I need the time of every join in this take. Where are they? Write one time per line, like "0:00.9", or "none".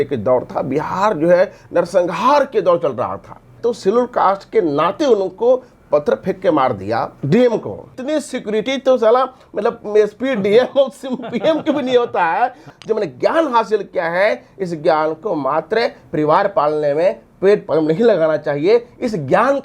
0:03.6
0:08.0
0:12.7